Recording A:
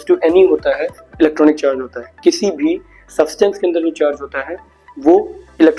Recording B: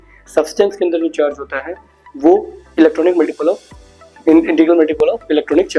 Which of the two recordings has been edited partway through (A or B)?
A